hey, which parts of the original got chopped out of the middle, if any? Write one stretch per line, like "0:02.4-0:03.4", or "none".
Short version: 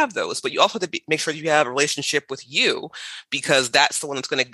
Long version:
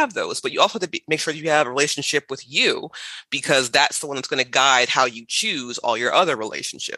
none

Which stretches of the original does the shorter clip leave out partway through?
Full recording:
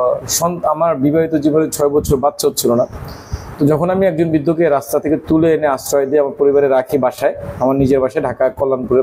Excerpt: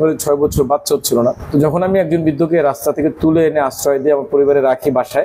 0:02.9-0:03.5

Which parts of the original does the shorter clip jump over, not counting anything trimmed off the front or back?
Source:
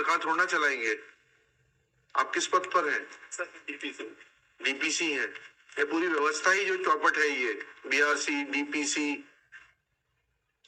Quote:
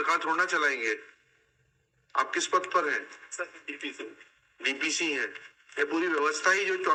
none

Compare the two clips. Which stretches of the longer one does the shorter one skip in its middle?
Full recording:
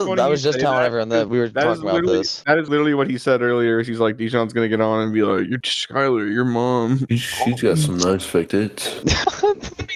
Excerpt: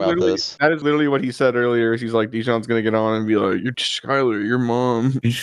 none

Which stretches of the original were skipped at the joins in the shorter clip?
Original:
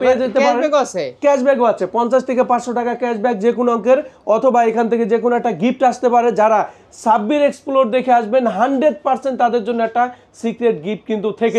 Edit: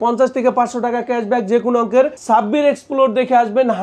0:04.1-0:06.9

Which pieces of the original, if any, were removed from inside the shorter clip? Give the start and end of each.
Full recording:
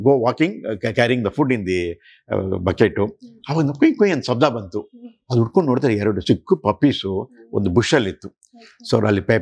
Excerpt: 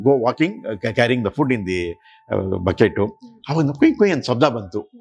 none

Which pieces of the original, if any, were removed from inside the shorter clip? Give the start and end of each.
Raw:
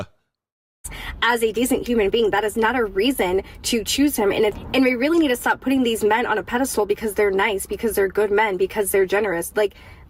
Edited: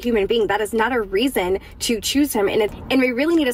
none

